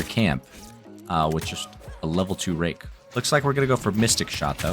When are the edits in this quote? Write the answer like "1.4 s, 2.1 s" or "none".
2.9 s